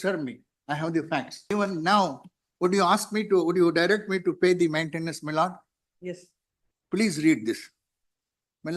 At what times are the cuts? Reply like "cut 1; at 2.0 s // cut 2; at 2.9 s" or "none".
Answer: cut 1; at 1.4 s